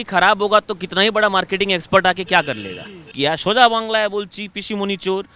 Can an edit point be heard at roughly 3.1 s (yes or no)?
yes